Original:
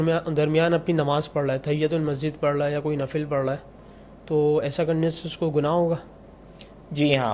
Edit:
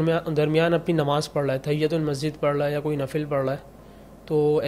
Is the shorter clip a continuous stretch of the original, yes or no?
yes